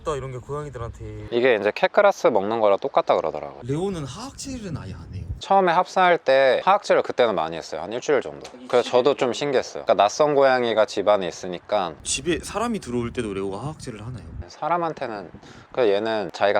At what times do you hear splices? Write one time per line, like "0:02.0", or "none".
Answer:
0:03.6
0:05.4
0:09.7
0:11.9